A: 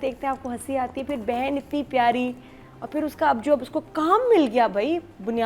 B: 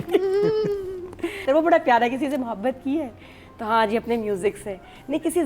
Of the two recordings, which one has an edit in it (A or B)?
B